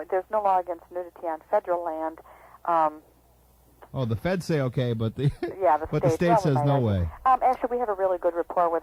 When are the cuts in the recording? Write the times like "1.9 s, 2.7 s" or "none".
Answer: none